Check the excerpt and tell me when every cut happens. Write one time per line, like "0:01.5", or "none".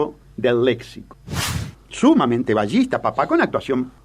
0:01.6